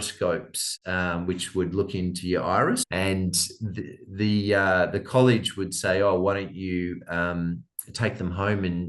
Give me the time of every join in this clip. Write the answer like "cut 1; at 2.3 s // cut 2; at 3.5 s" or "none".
cut 1; at 2.9 s